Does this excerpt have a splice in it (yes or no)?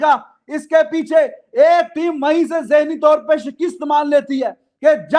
no